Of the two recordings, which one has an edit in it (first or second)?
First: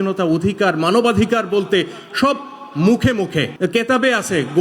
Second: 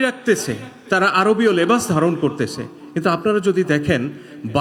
first